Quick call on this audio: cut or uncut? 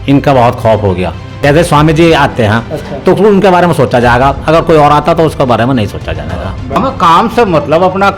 cut